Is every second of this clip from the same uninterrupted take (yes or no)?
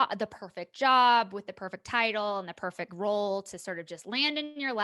yes